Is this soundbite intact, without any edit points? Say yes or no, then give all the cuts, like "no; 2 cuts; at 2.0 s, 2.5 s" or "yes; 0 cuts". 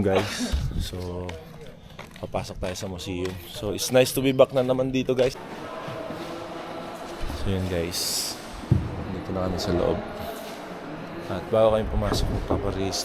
no; 1 cut; at 5.3 s